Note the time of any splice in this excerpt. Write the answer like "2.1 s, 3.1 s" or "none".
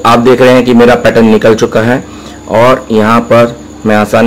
none